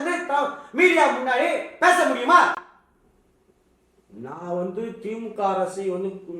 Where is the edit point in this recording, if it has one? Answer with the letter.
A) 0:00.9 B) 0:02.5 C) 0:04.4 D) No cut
D